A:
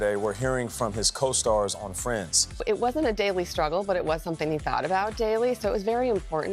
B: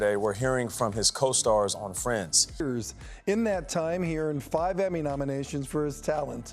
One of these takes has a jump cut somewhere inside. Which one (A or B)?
B